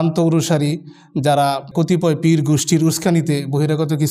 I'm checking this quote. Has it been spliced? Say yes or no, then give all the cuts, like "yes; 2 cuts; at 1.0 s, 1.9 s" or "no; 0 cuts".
yes; 1 cut; at 1.7 s